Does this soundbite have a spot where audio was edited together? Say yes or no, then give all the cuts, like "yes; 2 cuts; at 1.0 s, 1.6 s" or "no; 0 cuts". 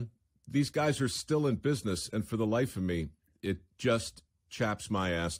no; 0 cuts